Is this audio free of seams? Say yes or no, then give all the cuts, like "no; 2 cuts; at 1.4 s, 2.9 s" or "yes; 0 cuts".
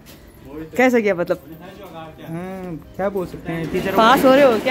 yes; 0 cuts